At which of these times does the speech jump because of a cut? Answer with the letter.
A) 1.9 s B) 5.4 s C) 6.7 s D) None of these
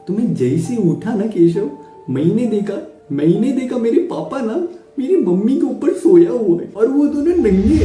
C